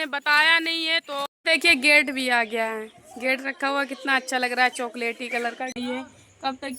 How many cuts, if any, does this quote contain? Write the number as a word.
two